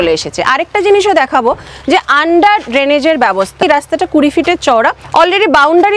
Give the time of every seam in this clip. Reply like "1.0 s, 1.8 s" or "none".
3.6 s, 5.0 s